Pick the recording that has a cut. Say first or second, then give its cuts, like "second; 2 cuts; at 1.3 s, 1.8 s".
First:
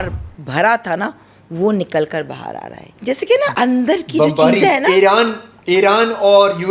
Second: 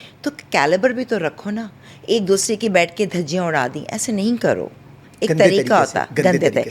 first; 1 cut; at 3.1 s